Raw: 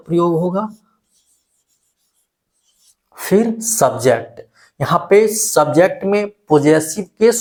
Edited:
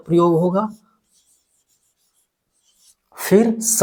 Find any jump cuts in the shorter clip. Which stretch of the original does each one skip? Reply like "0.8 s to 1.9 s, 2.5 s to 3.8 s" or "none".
none